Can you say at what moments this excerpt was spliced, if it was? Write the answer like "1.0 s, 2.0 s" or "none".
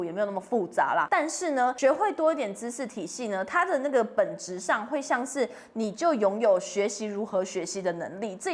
1.4 s